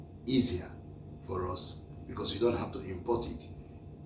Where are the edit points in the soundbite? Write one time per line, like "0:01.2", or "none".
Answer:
none